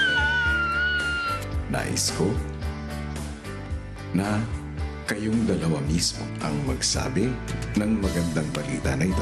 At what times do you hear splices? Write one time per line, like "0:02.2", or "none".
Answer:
none